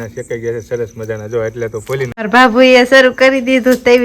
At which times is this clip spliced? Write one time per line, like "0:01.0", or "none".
0:02.3